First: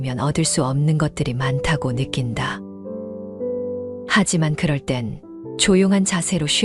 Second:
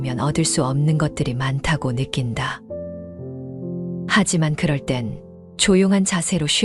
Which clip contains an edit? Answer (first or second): second